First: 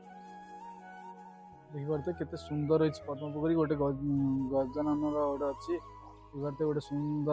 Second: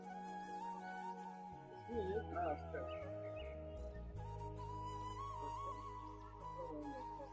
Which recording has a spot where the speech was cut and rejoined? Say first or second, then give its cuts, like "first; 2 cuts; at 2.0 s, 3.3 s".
first; 1 cut; at 1.6 s